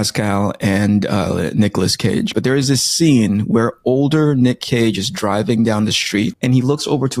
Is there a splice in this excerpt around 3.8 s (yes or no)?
no